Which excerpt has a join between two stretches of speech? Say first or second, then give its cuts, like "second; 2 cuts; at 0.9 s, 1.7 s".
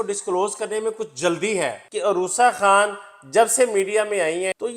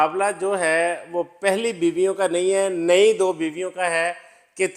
first; 1 cut; at 1.8 s